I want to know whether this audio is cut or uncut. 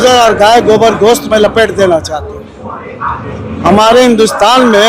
uncut